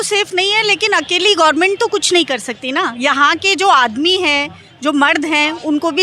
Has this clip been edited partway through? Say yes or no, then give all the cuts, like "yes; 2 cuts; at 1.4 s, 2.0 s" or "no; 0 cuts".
no; 0 cuts